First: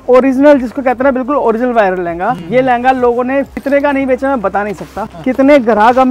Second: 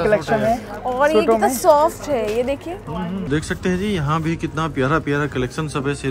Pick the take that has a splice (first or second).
second